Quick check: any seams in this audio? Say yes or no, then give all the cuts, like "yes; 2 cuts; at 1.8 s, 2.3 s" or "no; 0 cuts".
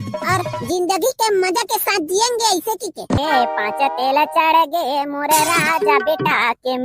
yes; 1 cut; at 3.2 s